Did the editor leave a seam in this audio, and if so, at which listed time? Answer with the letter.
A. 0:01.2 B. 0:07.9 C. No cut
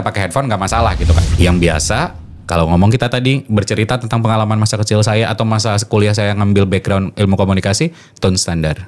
A